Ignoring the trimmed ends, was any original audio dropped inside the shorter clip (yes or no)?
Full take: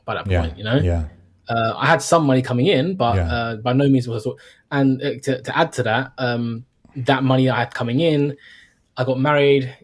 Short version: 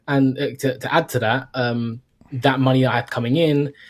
no